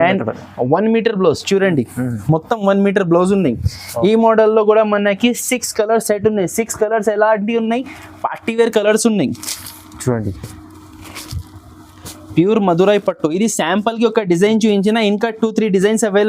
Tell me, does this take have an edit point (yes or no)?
no